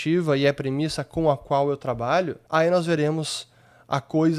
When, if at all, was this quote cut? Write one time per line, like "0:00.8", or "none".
0:02.4